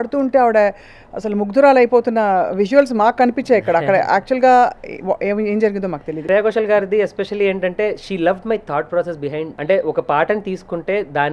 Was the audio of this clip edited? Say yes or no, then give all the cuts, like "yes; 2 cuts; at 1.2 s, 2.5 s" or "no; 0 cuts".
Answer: yes; 2 cuts; at 6.2 s, 9.5 s